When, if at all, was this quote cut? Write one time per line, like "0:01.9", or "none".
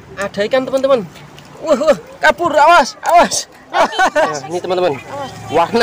0:04.5